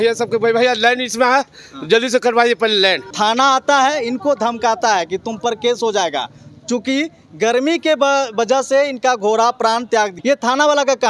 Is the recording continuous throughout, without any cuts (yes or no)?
no